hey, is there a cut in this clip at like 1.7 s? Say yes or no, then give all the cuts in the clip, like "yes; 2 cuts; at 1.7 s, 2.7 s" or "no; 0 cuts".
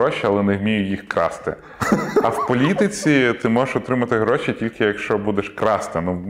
no; 0 cuts